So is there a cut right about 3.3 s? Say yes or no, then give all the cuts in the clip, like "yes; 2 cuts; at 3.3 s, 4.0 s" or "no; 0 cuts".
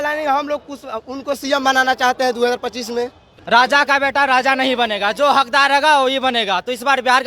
yes; 1 cut; at 3.3 s